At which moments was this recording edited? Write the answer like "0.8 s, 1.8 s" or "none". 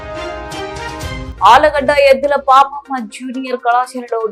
1.3 s

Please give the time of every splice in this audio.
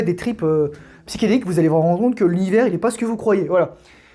none

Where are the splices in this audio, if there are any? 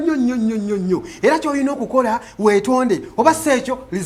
none

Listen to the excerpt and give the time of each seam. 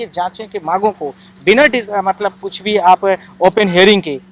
none

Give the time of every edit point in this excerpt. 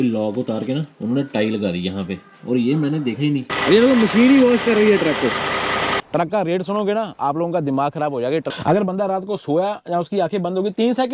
3.5 s, 6.0 s, 8.5 s

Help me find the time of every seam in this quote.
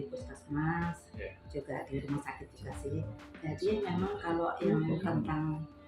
none

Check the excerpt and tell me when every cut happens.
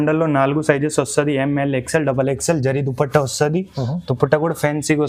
none

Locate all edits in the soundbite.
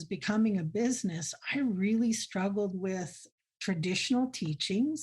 3.2 s

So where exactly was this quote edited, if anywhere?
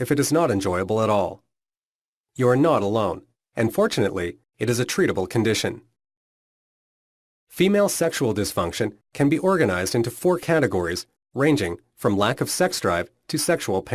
9.0 s

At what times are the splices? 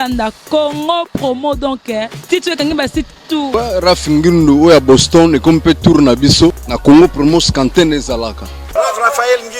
3.5 s, 6.7 s, 8.6 s

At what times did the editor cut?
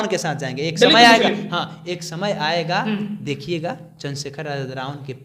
none

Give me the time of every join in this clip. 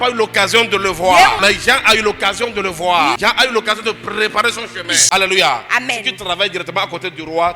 1.4 s, 3.1 s, 5.0 s

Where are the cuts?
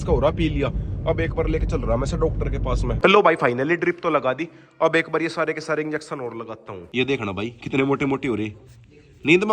3.0 s, 6.7 s

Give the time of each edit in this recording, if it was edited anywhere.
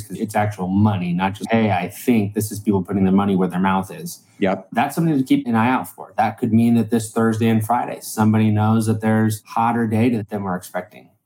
5.4 s, 9.4 s, 10.3 s

